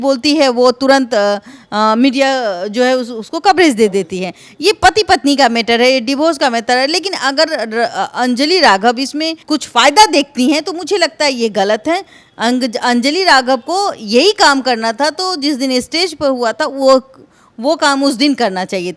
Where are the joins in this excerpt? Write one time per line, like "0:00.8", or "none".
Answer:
none